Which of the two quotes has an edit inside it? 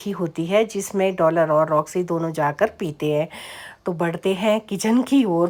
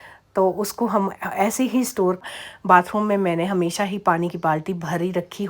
second; 1 cut; at 2.2 s

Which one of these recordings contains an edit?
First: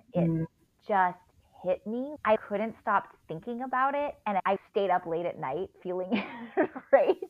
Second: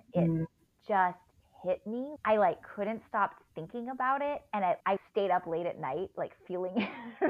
first; 3 cuts; at 2.4 s, 4.4 s, 5.7 s

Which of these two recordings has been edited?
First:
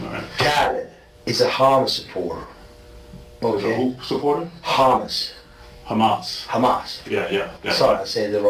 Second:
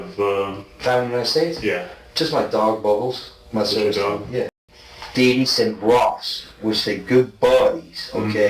second; 1 cut; at 4.5 s

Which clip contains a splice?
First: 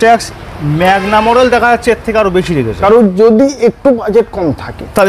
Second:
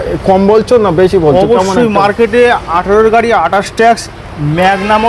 first; 1 cut; at 2.7 s

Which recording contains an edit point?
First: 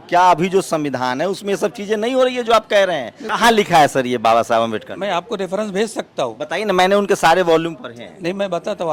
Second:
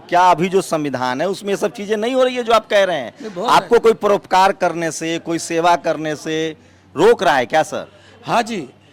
first; 1 cut; at 3.3 s

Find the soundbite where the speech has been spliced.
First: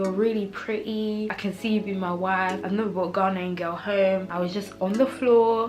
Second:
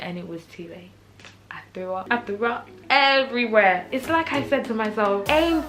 first; 3 cuts; at 1.3 s, 2.6 s, 4.3 s

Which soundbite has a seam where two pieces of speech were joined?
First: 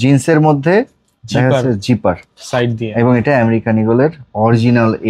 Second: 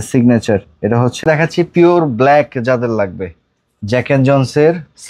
second; 1 cut; at 1.2 s

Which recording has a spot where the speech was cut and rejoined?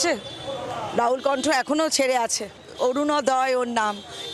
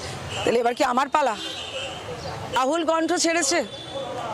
second; 1 cut; at 2.6 s

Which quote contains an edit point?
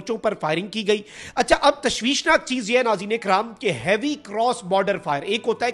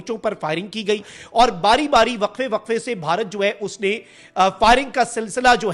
first; 1 cut; at 1.2 s

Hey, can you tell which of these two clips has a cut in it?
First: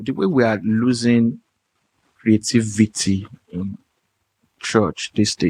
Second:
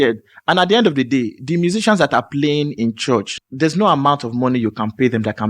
second; 1 cut; at 3.4 s

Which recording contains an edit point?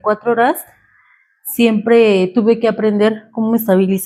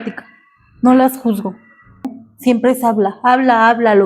second; 1 cut; at 2.2 s

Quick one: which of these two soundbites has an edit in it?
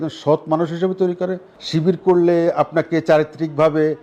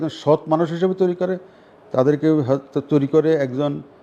first; 1 cut; at 1.5 s

